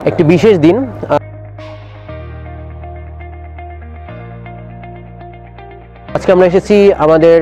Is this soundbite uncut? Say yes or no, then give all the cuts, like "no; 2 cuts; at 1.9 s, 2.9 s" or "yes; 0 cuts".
yes; 0 cuts